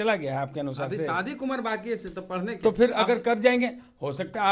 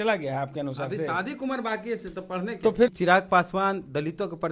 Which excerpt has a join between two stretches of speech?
second; 1 cut; at 2.9 s

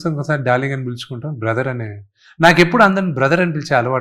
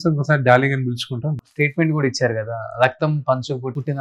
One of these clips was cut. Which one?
second; 1 cut; at 1.3 s

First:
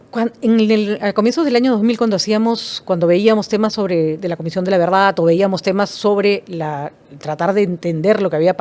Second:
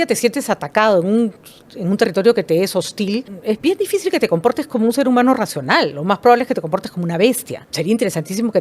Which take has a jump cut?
second; 2 cuts; at 3.3 s, 7.6 s

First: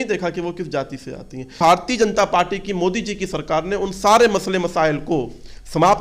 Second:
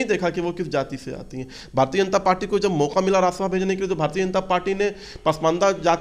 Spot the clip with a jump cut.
first; 1 cut; at 1.6 s

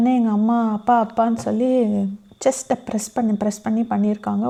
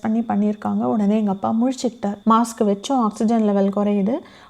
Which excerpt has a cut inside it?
second; 1 cut; at 2.1 s

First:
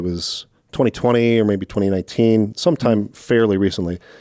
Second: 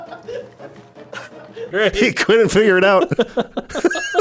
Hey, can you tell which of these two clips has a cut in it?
second; 1 cut; at 1.6 s

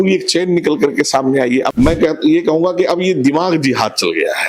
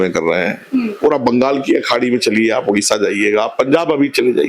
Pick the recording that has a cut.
first; 1 cut; at 1.7 s

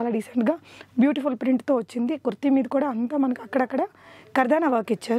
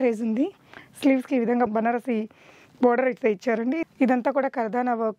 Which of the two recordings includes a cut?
second; 2 cuts; at 1.7 s, 3.9 s

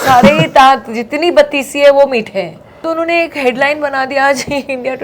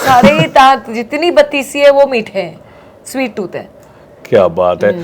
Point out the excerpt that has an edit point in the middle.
first; 1 cut; at 2.6 s

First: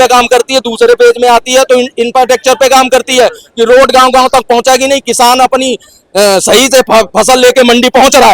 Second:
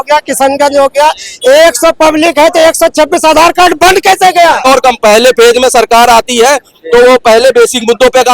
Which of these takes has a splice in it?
second; 1 cut; at 4.7 s

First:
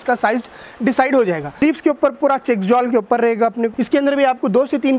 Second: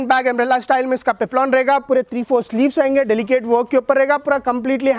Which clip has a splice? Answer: first; 2 cuts; at 1.6 s, 3.7 s

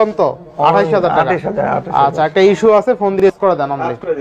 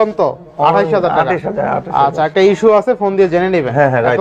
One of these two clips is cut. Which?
first; 1 cut; at 3.2 s

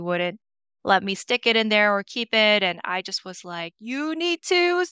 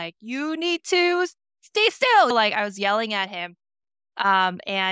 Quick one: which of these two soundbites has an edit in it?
second; 1 cut; at 2.3 s

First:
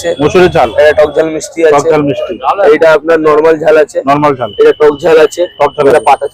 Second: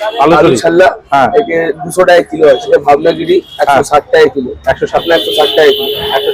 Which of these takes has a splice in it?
second; 2 cuts; at 2.7 s, 5.0 s

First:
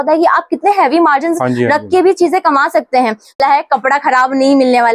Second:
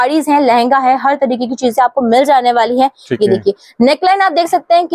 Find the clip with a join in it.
first; 1 cut; at 3.4 s

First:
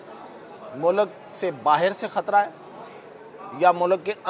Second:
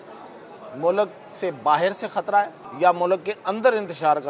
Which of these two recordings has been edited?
second; 1 cut; at 2.6 s

